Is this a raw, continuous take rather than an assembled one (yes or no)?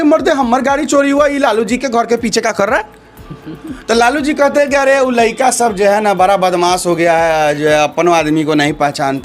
yes